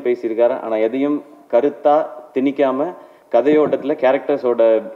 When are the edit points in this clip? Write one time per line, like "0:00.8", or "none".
none

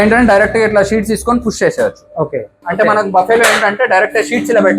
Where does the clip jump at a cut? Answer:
0:02.6

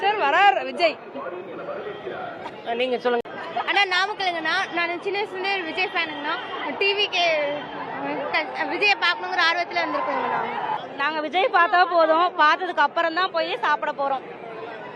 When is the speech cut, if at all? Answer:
none

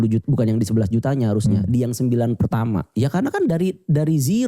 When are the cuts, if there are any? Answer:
0:02.9

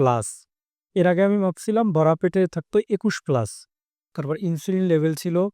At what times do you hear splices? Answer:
0:04.1

